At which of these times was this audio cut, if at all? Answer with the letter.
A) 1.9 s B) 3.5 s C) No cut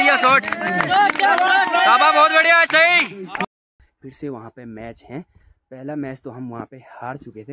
B